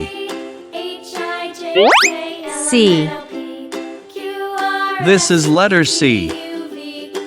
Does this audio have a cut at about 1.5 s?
no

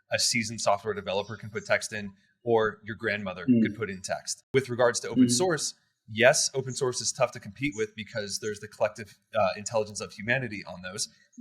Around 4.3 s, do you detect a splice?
yes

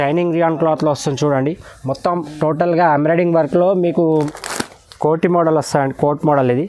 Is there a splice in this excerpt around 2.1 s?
no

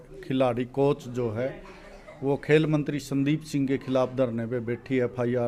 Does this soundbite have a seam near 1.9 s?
no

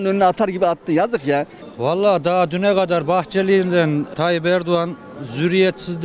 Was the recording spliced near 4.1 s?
yes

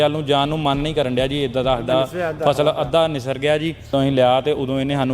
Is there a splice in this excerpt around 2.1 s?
no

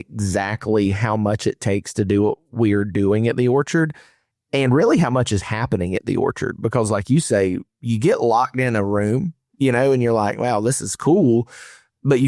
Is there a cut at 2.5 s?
no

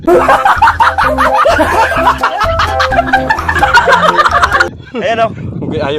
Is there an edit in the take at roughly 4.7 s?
yes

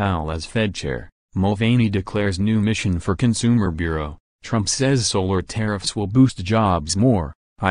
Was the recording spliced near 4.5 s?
no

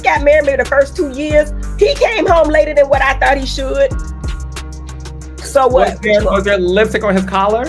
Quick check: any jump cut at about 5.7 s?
no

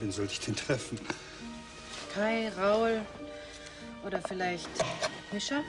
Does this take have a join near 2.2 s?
yes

